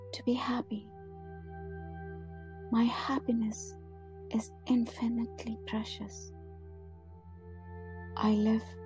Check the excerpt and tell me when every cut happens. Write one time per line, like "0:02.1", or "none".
0:00.8
0:02.6
0:06.1
0:08.2